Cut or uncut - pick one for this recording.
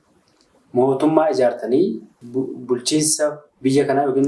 cut